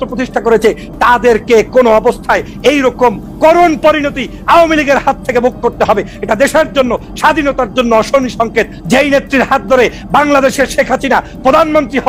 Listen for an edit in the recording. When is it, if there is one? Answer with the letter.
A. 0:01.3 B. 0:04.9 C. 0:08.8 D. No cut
C